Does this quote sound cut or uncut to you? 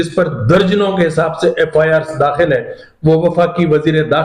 uncut